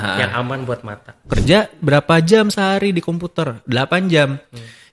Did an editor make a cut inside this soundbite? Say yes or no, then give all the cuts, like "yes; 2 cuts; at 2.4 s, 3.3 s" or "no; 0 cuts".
yes; 1 cut; at 1.3 s